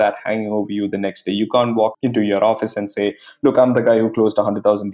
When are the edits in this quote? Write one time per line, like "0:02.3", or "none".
0:02.0